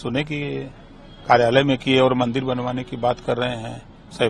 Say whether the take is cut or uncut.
uncut